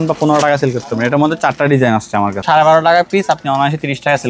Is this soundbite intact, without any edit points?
no; 1 cut; at 2.4 s

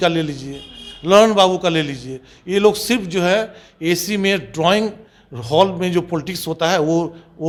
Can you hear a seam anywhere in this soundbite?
no; 0 cuts

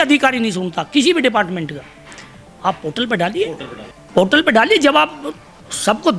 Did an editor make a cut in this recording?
no; 0 cuts

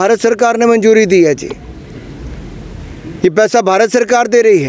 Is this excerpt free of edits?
yes; 0 cuts

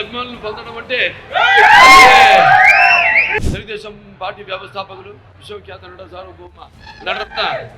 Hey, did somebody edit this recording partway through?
yes; 1 cut; at 3.3 s

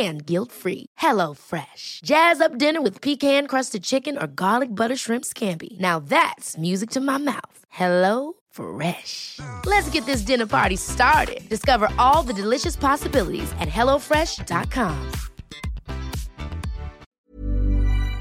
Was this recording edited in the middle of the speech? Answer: yes; 1 cut; at 17.0 s

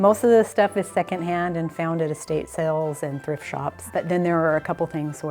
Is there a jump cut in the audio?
yes; 1 cut; at 3.8 s

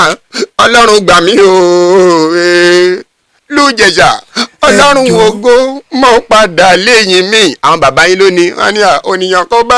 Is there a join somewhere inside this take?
no; 0 cuts

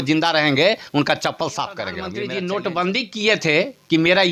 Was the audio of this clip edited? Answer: yes; 1 cut; at 2.1 s

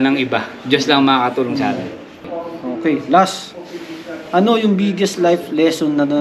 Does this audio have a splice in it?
yes; 1 cut; at 2.2 s

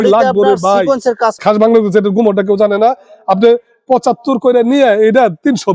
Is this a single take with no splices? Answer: no; 1 cut; at 1.3 s

